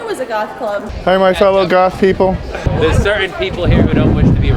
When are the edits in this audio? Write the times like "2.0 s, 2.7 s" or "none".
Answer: 0.9 s, 2.6 s